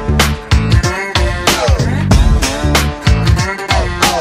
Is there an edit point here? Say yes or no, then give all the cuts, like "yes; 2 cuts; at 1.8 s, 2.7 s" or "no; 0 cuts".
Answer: no; 0 cuts